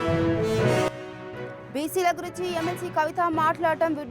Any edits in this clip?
no; 0 cuts

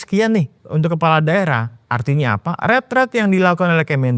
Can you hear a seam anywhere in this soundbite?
no; 0 cuts

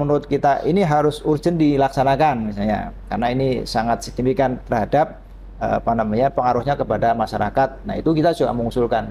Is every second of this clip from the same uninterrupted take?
yes; 0 cuts

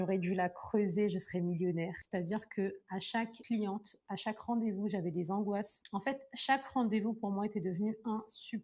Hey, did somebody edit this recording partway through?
yes; 2 cuts; at 1.9 s, 5.7 s

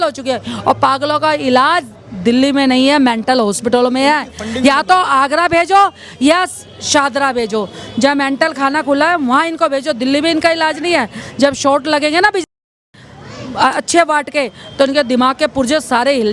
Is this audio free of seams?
yes; 0 cuts

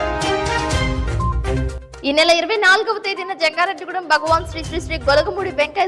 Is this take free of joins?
yes; 0 cuts

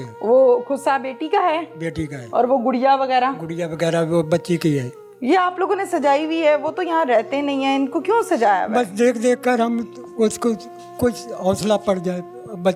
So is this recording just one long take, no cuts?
yes; 0 cuts

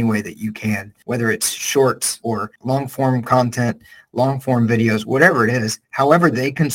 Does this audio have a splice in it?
yes; 2 cuts; at 0.9 s, 2.4 s

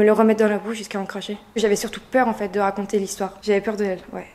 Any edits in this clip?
yes; 2 cuts; at 1.5 s, 3.3 s

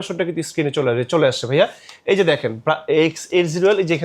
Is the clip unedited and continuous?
yes; 0 cuts

